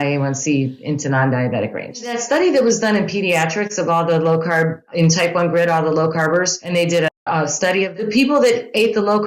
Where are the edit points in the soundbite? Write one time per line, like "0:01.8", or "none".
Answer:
0:02.1
0:04.8
0:06.6
0:08.0